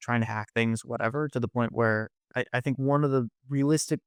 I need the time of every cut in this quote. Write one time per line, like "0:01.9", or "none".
none